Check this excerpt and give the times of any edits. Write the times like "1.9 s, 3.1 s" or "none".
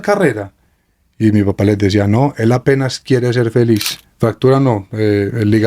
4.0 s